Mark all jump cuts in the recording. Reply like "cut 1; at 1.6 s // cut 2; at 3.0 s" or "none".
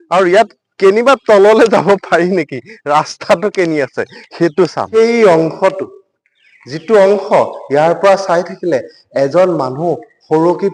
cut 1; at 4.9 s